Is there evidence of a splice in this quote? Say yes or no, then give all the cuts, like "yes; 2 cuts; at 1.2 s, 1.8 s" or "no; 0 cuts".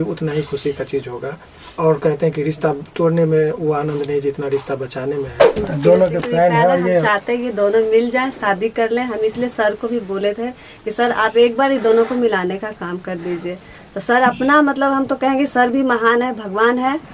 yes; 1 cut; at 5.6 s